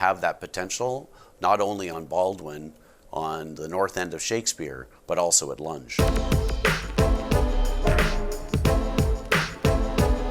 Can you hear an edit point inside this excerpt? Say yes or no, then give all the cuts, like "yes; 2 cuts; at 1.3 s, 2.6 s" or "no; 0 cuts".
yes; 1 cut; at 5.8 s